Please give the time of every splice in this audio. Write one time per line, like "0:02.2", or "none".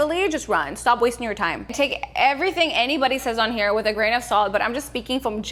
none